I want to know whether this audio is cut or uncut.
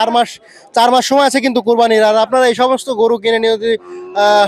uncut